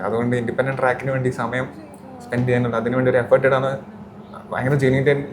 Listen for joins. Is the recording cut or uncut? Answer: uncut